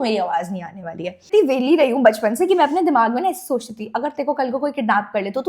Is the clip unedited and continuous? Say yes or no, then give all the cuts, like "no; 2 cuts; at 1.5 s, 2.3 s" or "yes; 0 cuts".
no; 1 cut; at 1.2 s